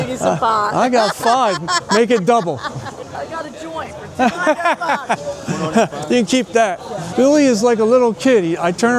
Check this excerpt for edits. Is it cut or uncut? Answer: cut